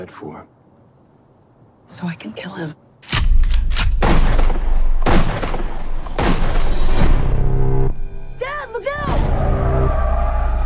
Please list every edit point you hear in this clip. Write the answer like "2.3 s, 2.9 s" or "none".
none